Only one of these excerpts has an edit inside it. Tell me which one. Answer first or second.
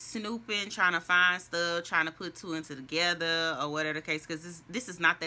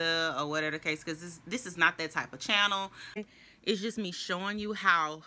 second